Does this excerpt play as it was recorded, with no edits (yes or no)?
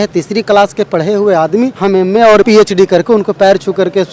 no